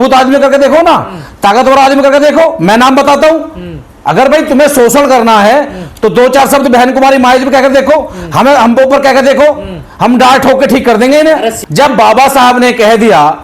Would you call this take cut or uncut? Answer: cut